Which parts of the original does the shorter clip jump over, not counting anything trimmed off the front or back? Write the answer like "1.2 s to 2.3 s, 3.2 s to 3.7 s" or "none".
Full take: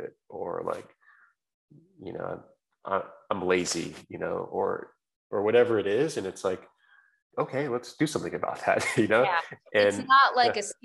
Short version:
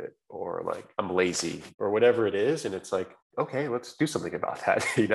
0.9 s to 3.2 s, 4.0 s to 5.2 s, 6.7 s to 7.2 s